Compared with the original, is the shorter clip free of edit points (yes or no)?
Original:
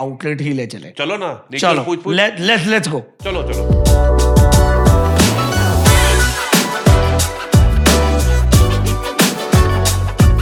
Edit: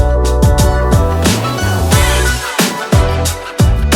yes